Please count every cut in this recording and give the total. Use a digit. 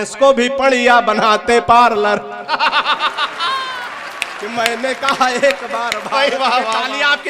0